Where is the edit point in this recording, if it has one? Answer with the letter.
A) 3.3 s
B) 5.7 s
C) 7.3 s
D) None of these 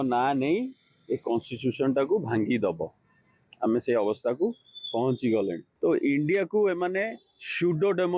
B